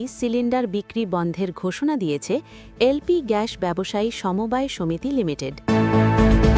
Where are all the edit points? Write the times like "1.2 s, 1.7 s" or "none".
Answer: 5.6 s